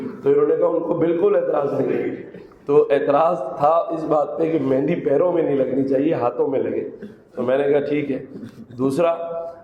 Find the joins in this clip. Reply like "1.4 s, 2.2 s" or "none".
none

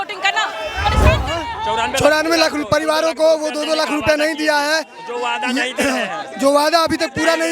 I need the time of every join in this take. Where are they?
1.2 s

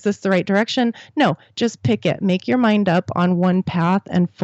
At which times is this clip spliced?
none

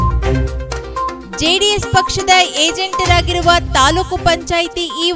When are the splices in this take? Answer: 1.2 s

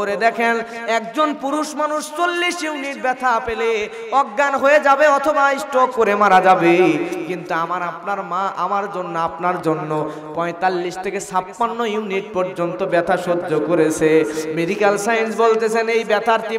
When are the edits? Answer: none

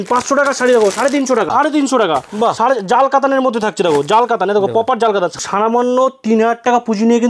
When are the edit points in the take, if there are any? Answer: 1.5 s, 5.3 s

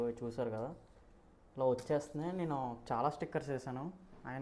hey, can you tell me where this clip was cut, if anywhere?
none

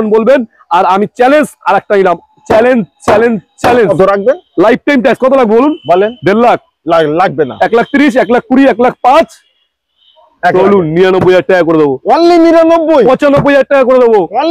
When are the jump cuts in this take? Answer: 3.9 s

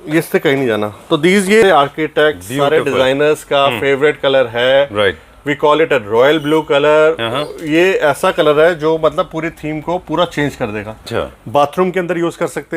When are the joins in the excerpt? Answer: 1.6 s, 11.1 s

